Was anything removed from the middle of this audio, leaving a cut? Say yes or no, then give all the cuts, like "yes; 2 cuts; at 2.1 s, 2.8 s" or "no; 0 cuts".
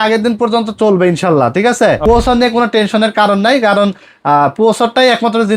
yes; 1 cut; at 2.0 s